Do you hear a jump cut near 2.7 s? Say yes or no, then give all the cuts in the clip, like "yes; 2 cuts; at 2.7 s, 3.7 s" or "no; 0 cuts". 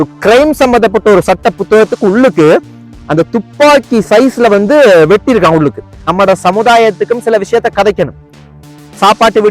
no; 1 cut; at 6.1 s